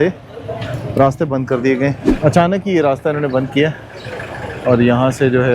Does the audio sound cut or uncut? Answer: cut